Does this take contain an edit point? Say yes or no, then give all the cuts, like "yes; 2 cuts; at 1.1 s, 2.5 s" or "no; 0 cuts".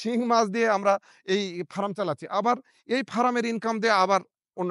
no; 0 cuts